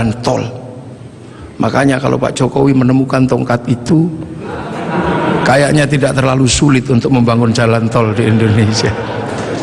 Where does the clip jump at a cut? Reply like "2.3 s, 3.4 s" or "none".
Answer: none